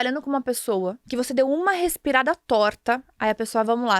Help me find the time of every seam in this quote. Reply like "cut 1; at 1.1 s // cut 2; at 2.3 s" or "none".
cut 1; at 1.0 s